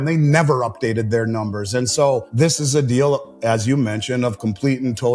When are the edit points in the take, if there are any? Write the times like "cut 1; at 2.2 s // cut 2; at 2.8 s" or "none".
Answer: cut 1; at 2.3 s